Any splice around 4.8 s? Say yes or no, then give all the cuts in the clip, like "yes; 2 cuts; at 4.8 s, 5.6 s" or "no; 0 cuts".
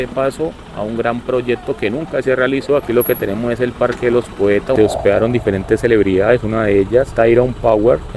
yes; 1 cut; at 4.8 s